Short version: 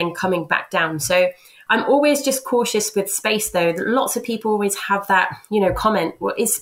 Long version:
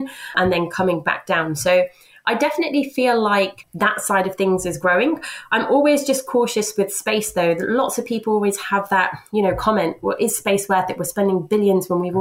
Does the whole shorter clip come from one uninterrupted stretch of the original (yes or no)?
no